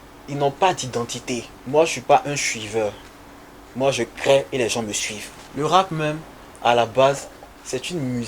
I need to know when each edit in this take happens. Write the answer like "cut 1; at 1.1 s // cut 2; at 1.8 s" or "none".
cut 1; at 5.4 s

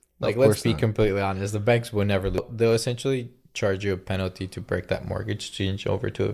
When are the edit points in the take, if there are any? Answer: cut 1; at 2.5 s

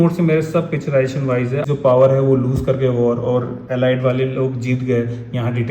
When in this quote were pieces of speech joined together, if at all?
cut 1; at 1.6 s

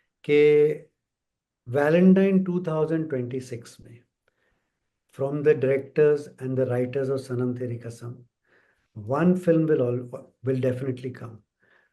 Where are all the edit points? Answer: none

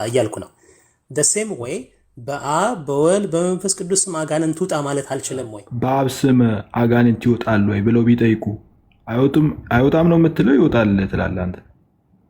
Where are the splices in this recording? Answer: cut 1; at 5.6 s

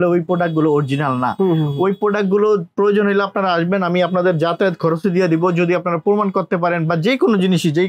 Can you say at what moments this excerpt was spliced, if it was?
none

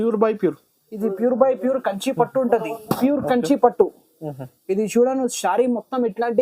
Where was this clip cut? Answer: none

